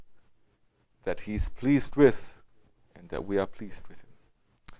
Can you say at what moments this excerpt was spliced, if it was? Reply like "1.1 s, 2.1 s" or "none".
1.5 s